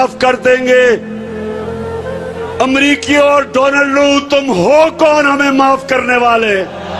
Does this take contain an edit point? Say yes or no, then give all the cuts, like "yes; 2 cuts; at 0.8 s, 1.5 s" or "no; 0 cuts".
yes; 2 cuts; at 1.1 s, 2.6 s